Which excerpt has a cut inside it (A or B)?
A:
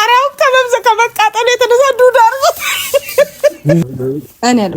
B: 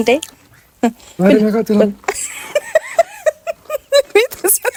A